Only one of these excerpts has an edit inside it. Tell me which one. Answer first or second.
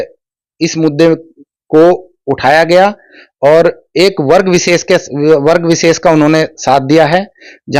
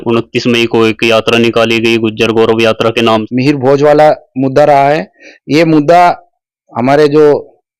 second